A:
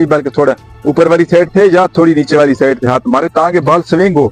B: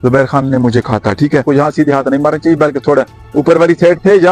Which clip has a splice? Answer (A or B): B